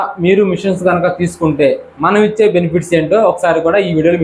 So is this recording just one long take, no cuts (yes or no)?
yes